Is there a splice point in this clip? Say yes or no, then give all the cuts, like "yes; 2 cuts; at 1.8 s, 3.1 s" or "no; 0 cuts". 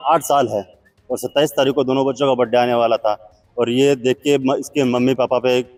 no; 0 cuts